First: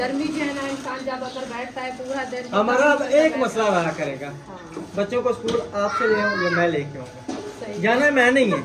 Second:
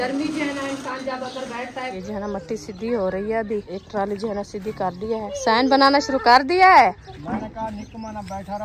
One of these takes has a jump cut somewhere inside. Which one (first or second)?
second